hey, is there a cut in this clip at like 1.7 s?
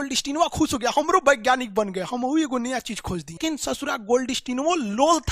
no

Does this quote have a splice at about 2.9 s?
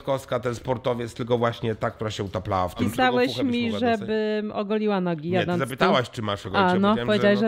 yes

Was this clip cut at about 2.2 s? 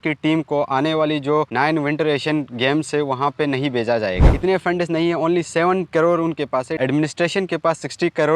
no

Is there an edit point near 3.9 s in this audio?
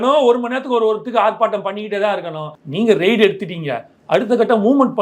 no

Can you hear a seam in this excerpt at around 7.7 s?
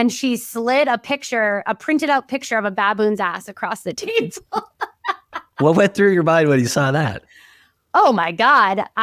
no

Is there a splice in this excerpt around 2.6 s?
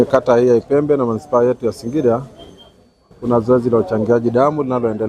no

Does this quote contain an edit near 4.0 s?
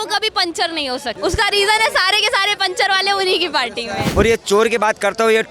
yes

